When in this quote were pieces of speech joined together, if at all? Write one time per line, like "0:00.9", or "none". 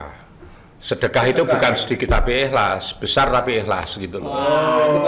none